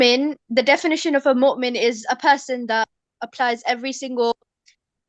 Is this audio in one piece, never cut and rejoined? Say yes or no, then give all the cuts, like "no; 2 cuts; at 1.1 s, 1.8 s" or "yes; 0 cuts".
no; 1 cut; at 3.0 s